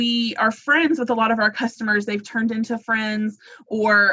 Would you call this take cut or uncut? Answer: uncut